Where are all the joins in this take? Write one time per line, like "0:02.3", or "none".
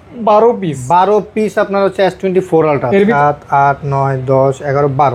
0:03.1